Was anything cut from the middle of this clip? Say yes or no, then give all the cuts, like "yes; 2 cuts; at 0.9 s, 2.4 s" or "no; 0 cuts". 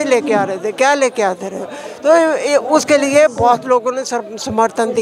no; 0 cuts